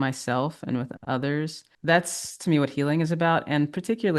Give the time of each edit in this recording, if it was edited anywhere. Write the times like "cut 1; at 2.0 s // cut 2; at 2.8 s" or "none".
cut 1; at 1.6 s